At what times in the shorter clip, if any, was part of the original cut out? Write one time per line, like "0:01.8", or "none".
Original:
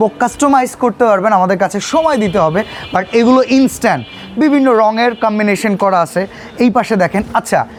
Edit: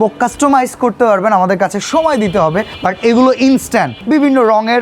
0:02.7
0:04.0